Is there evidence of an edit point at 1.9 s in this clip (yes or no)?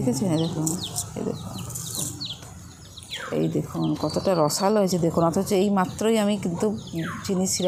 no